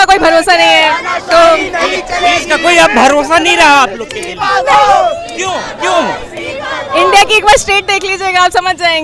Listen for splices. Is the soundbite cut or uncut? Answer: uncut